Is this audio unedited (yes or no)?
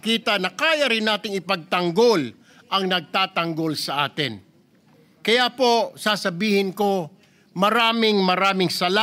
yes